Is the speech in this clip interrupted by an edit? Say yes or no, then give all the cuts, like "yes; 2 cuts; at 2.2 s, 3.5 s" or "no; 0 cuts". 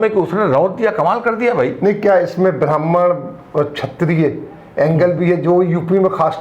no; 0 cuts